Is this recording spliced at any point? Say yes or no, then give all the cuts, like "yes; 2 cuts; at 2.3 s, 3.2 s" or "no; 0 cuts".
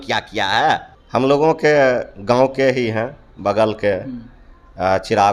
yes; 1 cut; at 0.9 s